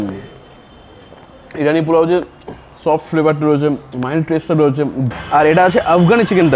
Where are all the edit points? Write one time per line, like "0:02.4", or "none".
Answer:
0:05.1

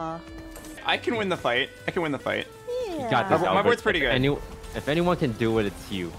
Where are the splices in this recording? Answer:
0:00.8
0:02.5

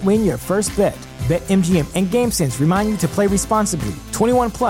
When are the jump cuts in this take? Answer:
none

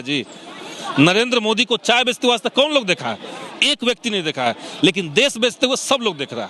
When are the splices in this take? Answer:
none

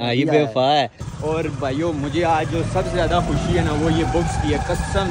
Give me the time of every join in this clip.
0:01.0

